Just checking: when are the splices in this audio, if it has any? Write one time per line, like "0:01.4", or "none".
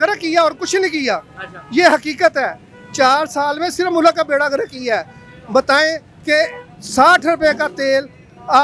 none